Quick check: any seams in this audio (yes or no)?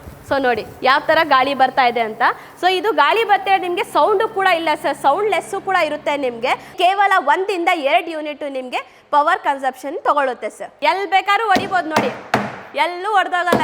yes